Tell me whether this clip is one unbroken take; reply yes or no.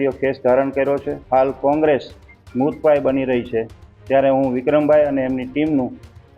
no